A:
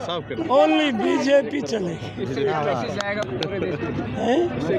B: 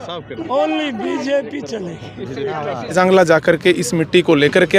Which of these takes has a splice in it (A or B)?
B